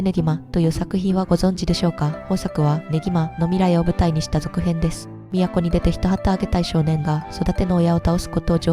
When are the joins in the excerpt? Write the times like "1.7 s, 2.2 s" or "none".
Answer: none